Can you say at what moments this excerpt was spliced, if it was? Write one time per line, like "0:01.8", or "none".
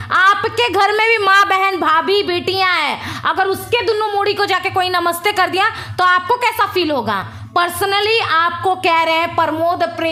none

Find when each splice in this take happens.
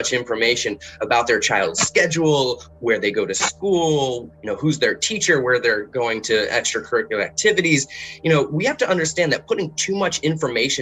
none

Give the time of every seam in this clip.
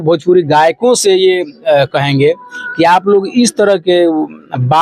none

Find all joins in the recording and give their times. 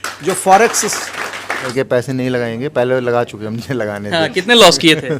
0:01.7

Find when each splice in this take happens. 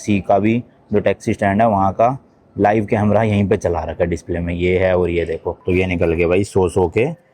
0:05.6

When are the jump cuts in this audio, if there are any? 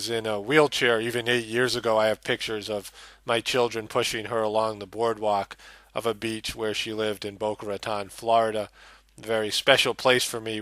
none

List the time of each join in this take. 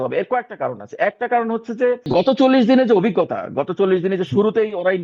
0:02.1

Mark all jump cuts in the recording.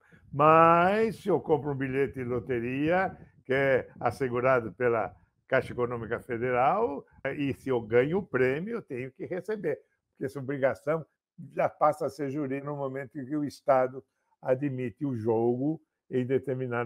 0:07.2
0:12.7

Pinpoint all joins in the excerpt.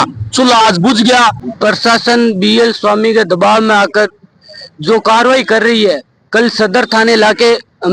0:01.5

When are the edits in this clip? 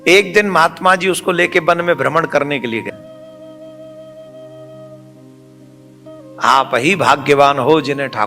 0:02.9

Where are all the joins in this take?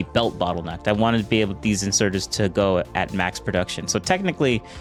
none

